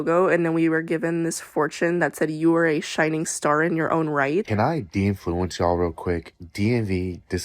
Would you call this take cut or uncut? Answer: cut